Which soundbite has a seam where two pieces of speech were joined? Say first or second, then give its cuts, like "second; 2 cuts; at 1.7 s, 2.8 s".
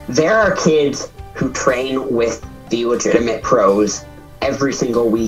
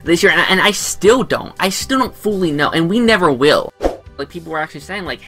second; 1 cut; at 3.9 s